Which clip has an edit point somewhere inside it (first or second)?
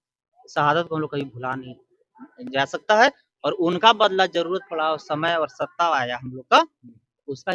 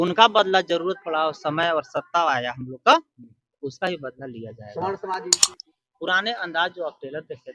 second